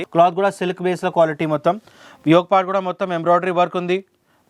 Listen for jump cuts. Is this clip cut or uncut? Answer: uncut